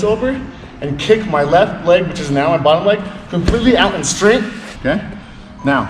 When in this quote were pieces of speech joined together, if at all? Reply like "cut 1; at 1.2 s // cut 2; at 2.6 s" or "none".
cut 1; at 4.7 s